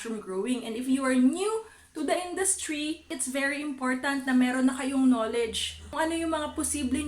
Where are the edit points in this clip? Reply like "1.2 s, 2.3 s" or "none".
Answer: 3.1 s, 5.9 s